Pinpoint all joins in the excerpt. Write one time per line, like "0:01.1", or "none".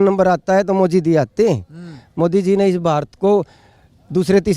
none